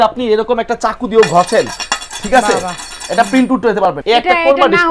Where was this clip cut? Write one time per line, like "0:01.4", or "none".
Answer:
0:04.0